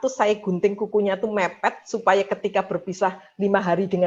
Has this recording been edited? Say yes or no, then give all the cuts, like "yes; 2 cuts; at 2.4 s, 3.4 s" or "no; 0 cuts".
no; 0 cuts